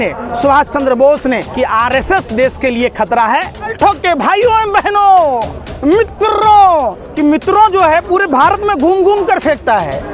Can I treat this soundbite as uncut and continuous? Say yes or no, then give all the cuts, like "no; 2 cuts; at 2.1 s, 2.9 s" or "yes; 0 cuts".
no; 3 cuts; at 1.5 s, 3.7 s, 7.0 s